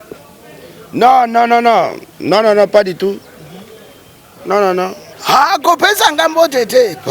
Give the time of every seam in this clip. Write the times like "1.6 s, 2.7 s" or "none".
5.1 s